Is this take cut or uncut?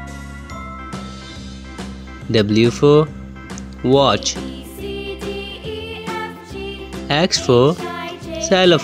cut